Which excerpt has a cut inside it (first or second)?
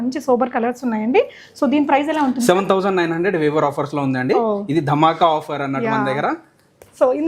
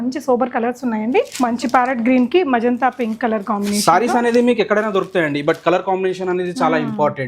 second